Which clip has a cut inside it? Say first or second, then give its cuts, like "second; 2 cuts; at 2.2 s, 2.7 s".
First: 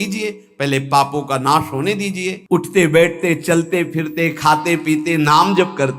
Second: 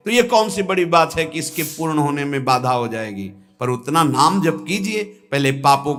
first; 1 cut; at 2.4 s